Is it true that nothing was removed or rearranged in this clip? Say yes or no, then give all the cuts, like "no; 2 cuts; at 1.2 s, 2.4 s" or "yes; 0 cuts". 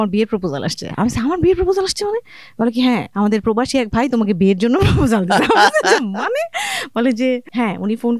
yes; 0 cuts